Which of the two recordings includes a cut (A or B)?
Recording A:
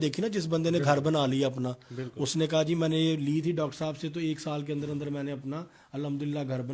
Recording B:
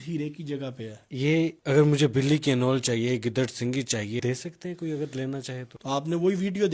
B